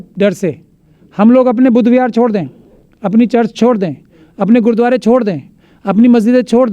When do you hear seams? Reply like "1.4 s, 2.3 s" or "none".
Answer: none